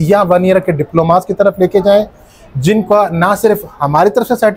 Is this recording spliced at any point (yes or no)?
no